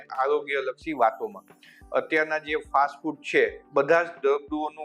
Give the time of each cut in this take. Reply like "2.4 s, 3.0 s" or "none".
3.6 s